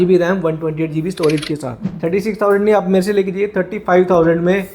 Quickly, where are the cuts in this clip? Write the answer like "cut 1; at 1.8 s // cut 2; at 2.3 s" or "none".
cut 1; at 1.9 s